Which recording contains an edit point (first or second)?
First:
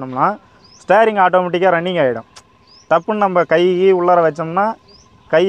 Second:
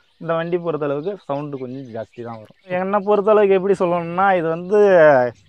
second